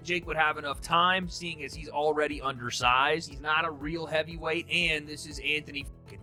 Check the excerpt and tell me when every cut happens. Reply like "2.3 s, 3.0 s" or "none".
none